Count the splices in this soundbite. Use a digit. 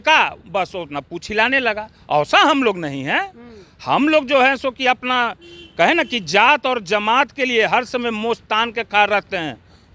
0